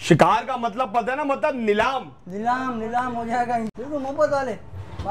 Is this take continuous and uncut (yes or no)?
no